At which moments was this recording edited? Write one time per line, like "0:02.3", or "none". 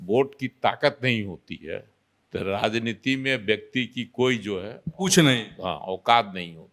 none